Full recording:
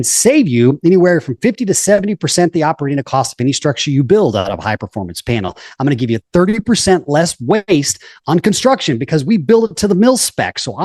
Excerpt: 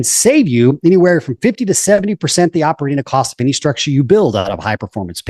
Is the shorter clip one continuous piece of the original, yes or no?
yes